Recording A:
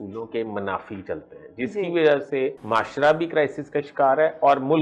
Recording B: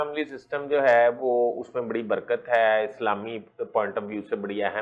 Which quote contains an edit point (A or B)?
A